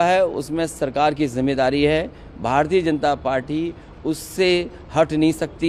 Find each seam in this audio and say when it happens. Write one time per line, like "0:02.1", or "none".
none